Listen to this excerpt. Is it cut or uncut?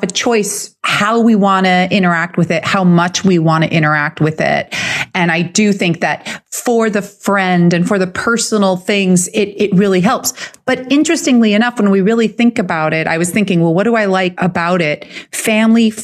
uncut